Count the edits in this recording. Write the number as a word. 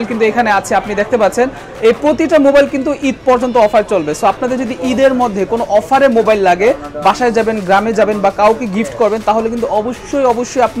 zero